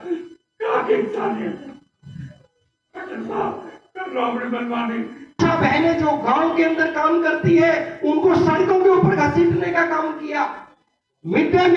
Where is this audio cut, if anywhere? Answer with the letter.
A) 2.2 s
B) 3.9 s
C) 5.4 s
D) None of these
C